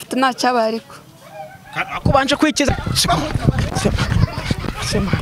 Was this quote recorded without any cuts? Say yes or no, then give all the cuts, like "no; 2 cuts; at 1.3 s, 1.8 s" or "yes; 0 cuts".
no; 1 cut; at 2.7 s